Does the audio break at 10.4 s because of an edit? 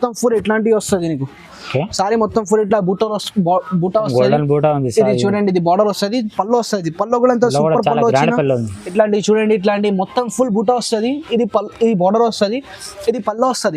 no; 1 cut; at 8.8 s

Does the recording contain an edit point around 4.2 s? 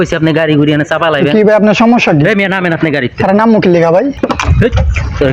yes; 1 cut; at 4.2 s

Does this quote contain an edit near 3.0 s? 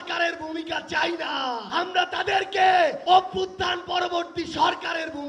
yes; 2 cuts; at 1.7 s, 3.0 s

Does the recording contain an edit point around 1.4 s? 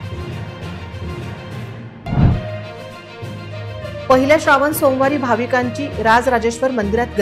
no; 0 cuts

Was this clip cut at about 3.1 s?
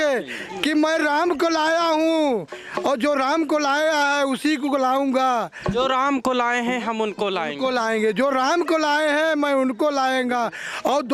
no; 0 cuts

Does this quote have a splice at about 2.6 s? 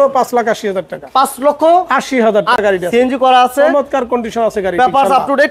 yes; 1 cut; at 2.6 s

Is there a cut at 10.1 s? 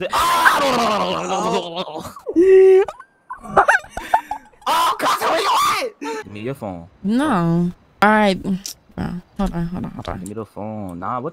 no; 2 cuts; at 6.2 s, 8.0 s

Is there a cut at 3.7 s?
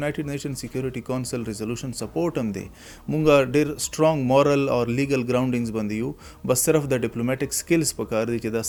no; 0 cuts

